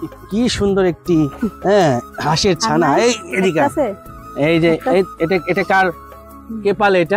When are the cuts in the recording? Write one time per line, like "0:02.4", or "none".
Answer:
none